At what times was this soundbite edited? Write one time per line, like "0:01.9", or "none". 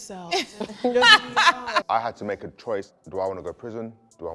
0:01.8
0:02.9